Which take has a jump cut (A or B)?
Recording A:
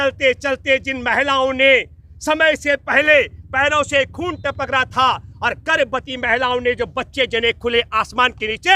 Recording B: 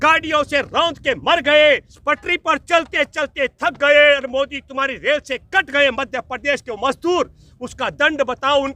B